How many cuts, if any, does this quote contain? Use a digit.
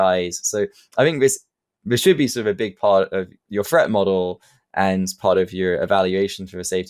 1